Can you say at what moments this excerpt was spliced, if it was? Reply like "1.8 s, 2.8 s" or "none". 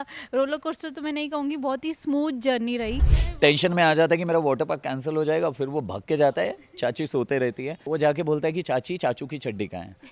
3.2 s, 7.8 s